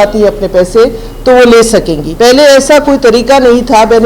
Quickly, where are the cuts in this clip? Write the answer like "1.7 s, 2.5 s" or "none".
2.0 s